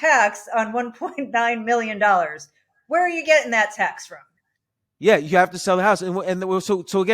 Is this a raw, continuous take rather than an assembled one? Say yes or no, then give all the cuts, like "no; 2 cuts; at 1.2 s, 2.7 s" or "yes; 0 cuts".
yes; 0 cuts